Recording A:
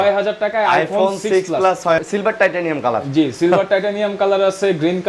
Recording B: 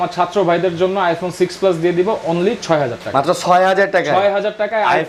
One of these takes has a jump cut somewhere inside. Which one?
A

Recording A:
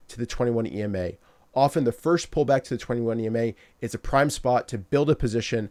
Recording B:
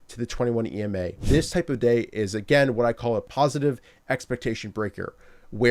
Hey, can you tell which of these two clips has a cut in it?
B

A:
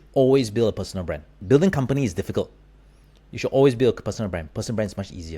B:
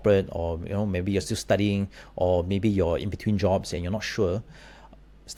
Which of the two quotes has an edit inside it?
A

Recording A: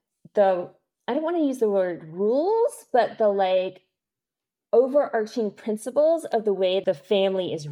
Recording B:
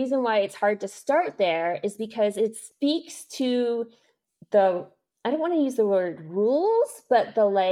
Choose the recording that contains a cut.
A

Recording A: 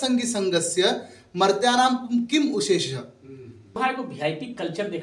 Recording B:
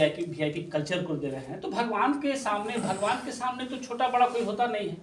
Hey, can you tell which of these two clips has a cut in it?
A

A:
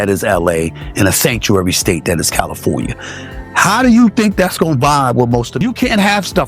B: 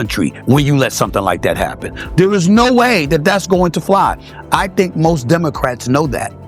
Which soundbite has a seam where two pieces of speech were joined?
A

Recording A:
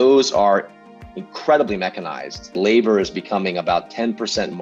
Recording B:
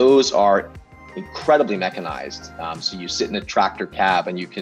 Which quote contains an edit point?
A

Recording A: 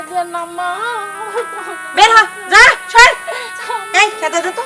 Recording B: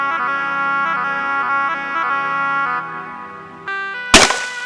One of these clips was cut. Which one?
B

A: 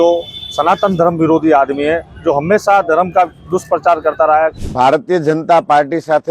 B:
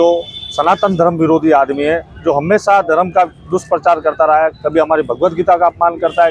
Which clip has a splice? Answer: A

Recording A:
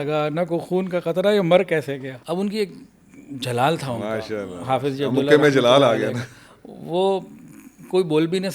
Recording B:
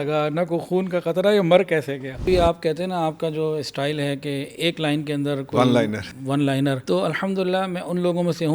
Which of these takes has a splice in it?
B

